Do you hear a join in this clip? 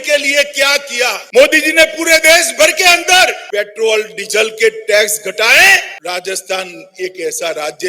yes; 3 cuts; at 1.2 s, 3.4 s, 5.9 s

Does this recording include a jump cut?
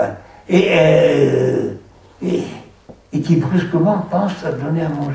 yes; 1 cut; at 3.3 s

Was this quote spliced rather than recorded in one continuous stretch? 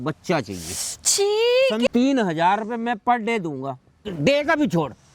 yes; 2 cuts; at 1.9 s, 4.1 s

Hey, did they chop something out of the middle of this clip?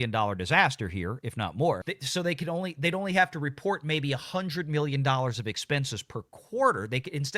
yes; 1 cut; at 1.9 s

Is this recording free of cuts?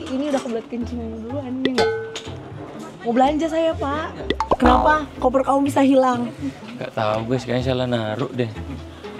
no; 1 cut; at 4.4 s

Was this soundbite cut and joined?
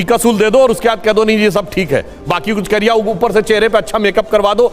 no; 0 cuts

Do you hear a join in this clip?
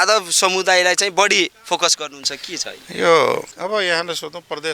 yes; 1 cut; at 3.5 s

